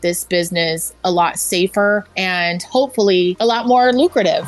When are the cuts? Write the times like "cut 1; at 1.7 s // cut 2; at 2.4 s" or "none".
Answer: cut 1; at 2.2 s // cut 2; at 3.4 s